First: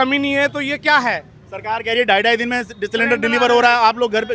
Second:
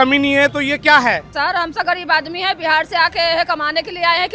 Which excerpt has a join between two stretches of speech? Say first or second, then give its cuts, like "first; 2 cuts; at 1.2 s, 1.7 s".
second; 1 cut; at 1.3 s